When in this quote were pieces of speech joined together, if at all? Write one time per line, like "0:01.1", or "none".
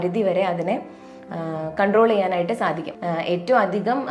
0:02.9